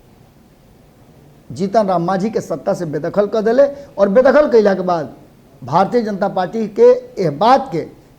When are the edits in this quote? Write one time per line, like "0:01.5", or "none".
none